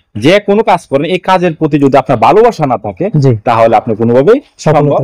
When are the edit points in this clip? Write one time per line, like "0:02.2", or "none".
none